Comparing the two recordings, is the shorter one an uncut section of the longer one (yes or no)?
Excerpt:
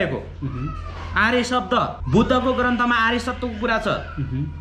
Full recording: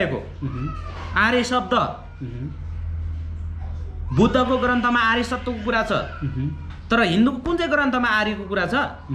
no